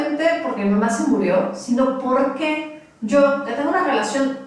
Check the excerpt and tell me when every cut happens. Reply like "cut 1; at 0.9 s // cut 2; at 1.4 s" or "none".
none